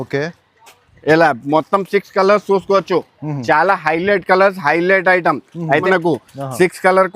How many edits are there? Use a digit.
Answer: 1